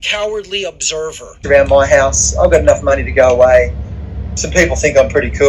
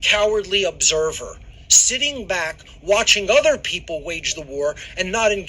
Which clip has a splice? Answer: first; 1 cut; at 1.4 s

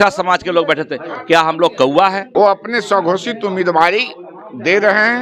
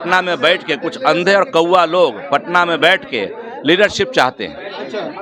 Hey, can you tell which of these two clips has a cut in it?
first; 1 cut; at 2.2 s

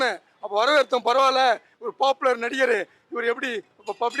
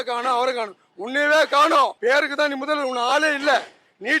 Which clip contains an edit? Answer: second; 1 cut; at 2.0 s

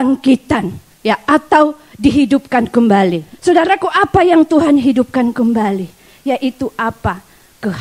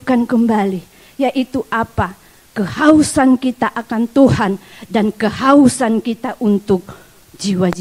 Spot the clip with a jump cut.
first; 1 cut; at 3.3 s

